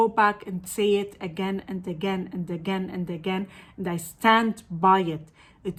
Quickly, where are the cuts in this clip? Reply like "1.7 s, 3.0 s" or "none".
none